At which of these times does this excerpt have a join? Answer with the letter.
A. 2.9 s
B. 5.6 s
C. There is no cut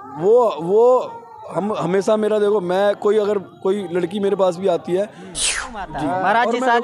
B